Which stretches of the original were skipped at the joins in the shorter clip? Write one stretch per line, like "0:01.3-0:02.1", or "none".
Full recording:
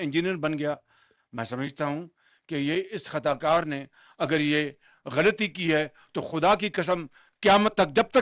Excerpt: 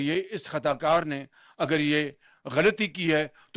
none